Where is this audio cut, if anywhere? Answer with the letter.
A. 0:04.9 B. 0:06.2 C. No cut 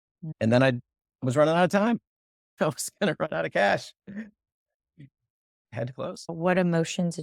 B